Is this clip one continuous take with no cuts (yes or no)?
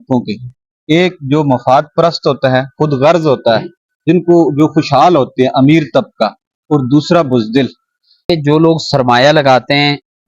no